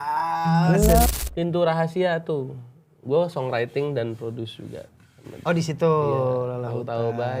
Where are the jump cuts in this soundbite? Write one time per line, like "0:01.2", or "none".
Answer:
0:01.1